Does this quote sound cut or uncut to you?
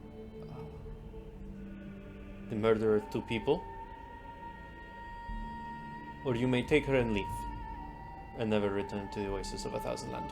uncut